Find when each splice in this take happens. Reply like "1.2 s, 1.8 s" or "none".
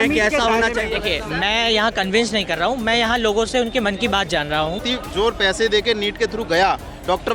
4.8 s